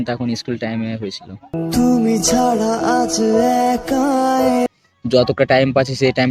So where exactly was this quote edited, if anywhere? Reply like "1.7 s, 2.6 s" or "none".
4.7 s